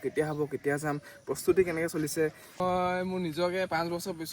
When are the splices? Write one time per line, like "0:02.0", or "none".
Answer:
0:02.6